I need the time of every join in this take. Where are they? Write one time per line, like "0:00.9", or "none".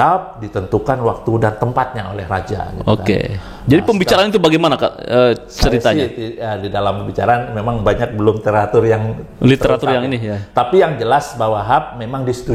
none